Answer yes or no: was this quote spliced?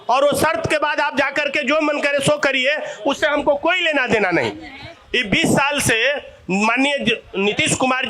no